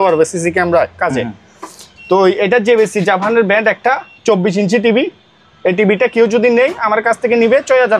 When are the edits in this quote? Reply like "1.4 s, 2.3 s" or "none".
none